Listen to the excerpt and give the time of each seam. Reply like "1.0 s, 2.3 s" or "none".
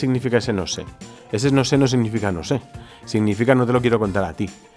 none